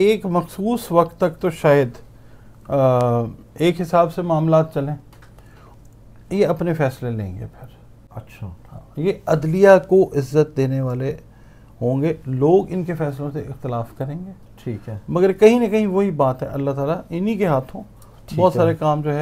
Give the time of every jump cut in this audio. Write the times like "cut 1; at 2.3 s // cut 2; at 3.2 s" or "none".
none